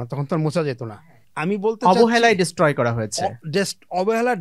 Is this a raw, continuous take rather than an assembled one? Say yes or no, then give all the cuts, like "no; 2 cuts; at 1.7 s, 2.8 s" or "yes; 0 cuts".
no; 1 cut; at 1.0 s